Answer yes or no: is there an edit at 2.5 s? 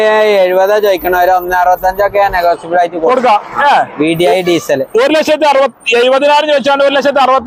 no